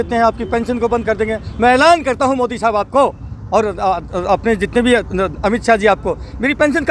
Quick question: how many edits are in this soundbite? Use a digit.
0